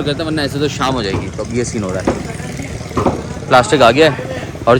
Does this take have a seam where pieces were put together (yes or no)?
no